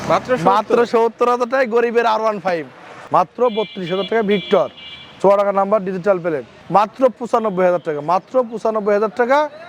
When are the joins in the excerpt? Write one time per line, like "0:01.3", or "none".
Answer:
0:03.0
0:06.5